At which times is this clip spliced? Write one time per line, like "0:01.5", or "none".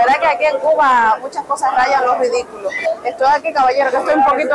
none